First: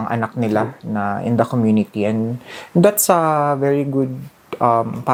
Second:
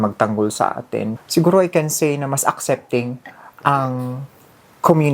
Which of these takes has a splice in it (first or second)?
second